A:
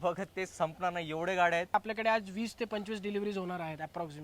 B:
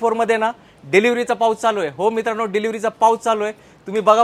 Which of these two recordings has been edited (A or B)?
A